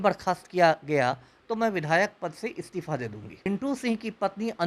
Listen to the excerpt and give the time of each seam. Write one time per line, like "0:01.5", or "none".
0:03.5